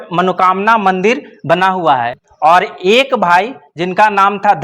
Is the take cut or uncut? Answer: cut